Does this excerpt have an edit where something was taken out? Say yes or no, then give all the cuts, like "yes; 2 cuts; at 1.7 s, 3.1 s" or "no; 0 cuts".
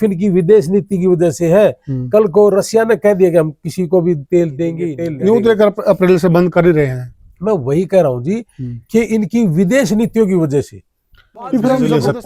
no; 0 cuts